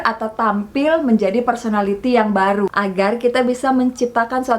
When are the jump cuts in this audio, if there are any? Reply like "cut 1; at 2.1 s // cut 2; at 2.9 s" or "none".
cut 1; at 2.7 s